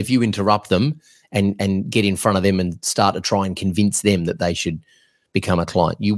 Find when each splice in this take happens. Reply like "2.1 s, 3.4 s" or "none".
none